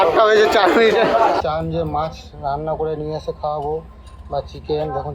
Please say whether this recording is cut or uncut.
cut